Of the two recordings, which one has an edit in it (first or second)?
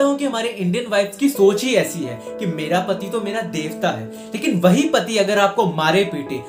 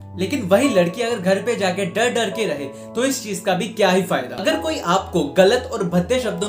second